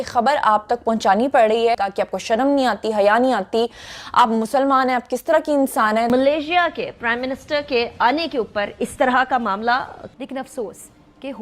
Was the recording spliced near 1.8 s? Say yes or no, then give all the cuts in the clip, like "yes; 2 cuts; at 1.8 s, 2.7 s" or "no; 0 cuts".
yes; 1 cut; at 1.8 s